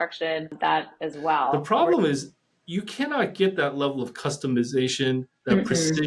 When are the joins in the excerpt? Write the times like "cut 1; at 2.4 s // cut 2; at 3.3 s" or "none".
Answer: cut 1; at 1.5 s